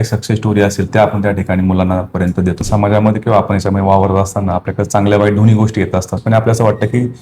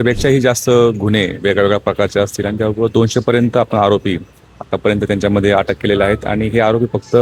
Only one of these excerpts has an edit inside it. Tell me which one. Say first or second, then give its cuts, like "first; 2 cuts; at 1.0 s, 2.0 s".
first; 2 cuts; at 2.6 s, 6.2 s